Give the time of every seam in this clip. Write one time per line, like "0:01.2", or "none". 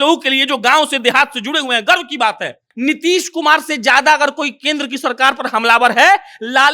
0:02.6